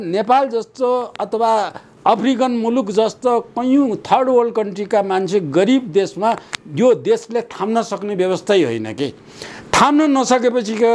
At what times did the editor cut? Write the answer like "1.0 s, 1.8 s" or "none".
none

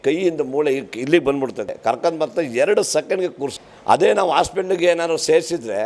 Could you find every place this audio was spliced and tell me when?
1.7 s, 3.6 s

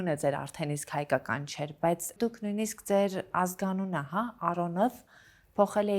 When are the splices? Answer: 2.1 s

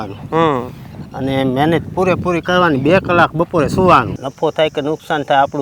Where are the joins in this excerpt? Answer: 4.2 s

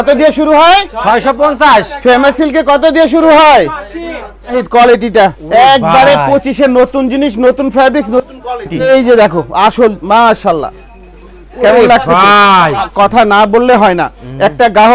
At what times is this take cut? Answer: 4.6 s, 8.9 s, 12.9 s

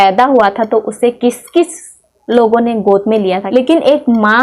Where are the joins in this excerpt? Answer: 3.4 s

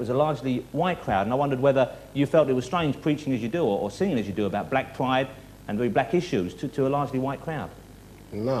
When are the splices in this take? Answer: 3.8 s

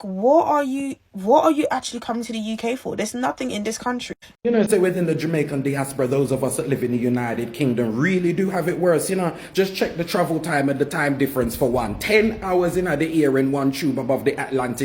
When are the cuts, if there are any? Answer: 4.4 s

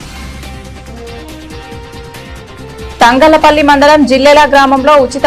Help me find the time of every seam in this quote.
none

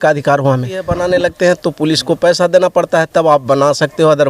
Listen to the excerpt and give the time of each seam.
1.1 s

